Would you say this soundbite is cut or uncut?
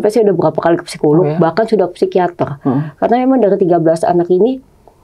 uncut